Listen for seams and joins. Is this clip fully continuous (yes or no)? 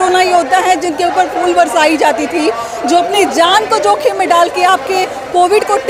yes